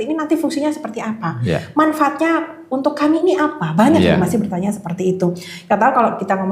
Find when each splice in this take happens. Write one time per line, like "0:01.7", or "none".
none